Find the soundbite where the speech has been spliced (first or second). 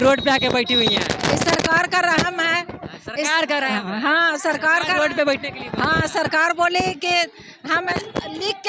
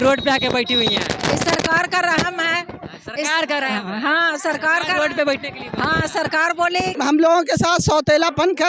second